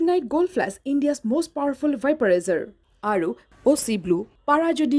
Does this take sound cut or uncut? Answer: uncut